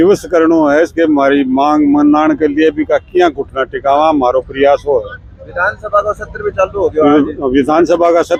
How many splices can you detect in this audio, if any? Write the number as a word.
zero